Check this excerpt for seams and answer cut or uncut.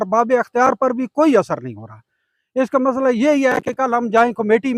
uncut